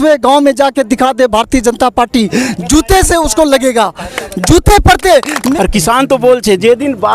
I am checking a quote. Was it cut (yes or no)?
yes